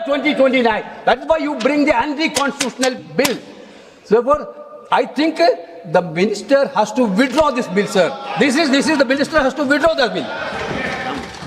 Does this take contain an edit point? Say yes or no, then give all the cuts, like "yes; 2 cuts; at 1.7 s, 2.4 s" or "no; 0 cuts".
no; 0 cuts